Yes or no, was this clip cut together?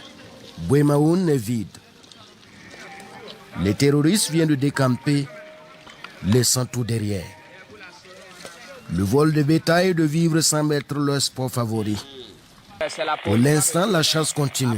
yes